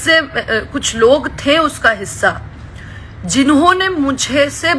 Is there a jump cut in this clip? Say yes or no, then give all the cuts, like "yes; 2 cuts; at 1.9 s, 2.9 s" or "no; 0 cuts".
no; 0 cuts